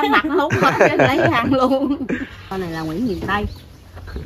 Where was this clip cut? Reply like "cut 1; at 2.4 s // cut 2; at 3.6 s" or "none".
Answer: cut 1; at 2.5 s